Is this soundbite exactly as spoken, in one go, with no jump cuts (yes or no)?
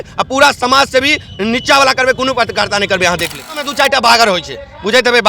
no